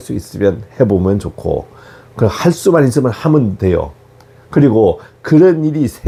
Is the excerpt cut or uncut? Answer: uncut